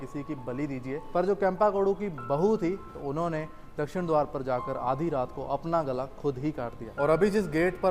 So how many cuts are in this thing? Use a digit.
3